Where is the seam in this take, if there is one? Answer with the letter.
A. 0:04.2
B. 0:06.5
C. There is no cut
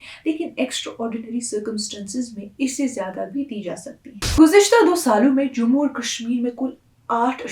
A